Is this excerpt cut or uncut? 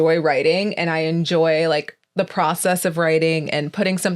uncut